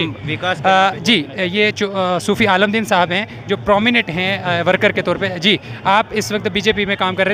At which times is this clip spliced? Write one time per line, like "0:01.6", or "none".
none